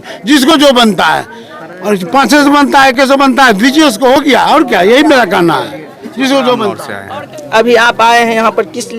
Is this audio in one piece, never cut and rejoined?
no; 1 cut; at 6.9 s

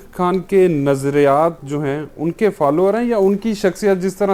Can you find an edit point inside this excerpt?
no; 0 cuts

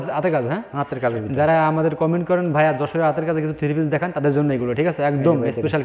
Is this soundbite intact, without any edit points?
yes; 0 cuts

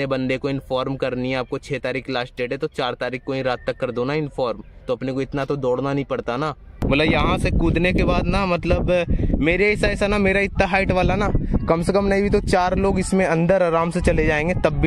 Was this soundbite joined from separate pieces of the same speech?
yes; 1 cut; at 6.8 s

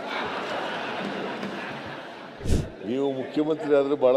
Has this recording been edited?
yes; 1 cut; at 2.4 s

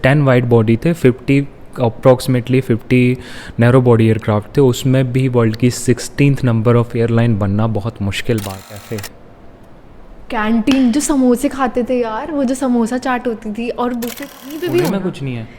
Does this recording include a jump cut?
yes; 2 cuts; at 8.7 s, 14.2 s

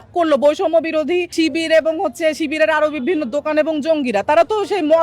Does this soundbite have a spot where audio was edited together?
yes; 1 cut; at 1.3 s

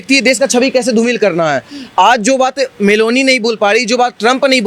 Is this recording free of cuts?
yes; 0 cuts

